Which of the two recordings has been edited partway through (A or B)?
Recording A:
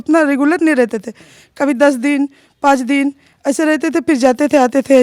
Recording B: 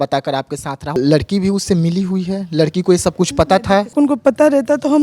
B